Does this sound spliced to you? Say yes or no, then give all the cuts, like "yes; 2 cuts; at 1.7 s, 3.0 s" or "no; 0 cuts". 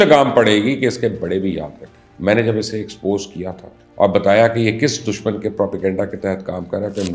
no; 0 cuts